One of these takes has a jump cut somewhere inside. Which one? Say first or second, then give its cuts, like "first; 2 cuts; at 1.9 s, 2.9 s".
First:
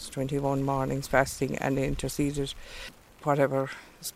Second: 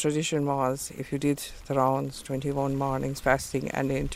first; 1 cut; at 3.0 s